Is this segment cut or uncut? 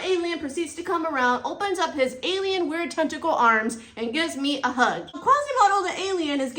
cut